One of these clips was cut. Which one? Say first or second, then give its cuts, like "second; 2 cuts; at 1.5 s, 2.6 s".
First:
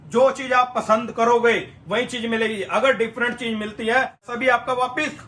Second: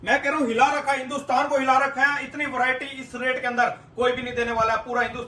first; 1 cut; at 4.2 s